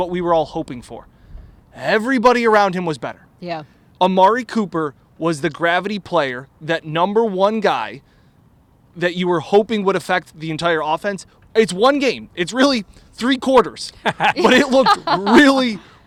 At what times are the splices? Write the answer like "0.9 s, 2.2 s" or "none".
none